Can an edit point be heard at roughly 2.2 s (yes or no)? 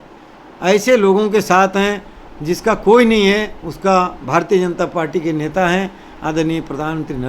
no